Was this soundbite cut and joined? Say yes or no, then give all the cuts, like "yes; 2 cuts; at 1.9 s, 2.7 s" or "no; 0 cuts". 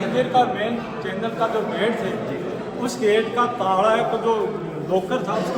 no; 0 cuts